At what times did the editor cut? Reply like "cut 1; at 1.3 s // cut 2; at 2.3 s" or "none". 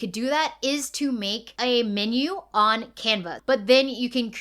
cut 1; at 3.3 s